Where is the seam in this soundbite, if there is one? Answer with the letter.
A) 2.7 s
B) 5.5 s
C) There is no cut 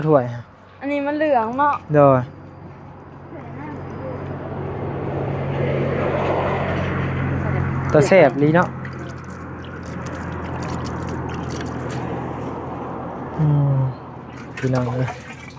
C